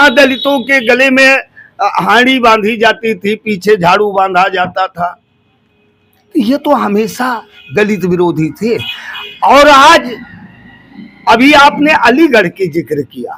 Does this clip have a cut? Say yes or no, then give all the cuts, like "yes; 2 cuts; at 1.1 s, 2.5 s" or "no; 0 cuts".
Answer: no; 0 cuts